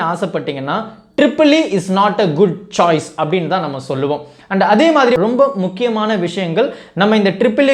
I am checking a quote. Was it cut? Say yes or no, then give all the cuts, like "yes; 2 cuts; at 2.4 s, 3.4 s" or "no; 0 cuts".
yes; 1 cut; at 5.2 s